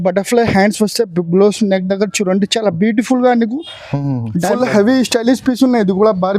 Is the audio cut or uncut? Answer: cut